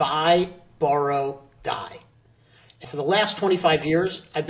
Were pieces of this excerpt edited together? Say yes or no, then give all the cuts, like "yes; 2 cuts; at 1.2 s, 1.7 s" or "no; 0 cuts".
yes; 1 cut; at 2.9 s